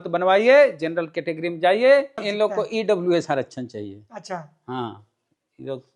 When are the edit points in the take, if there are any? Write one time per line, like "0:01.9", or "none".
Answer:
0:02.2